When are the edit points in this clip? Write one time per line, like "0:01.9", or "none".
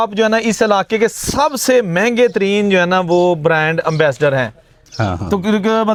none